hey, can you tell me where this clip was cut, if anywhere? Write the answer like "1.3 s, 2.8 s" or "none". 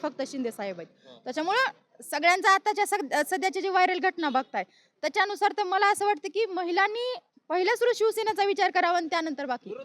none